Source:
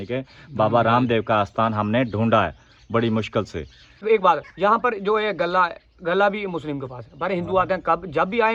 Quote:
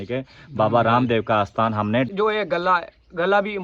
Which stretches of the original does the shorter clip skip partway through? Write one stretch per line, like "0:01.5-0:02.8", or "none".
0:02.1-0:05.0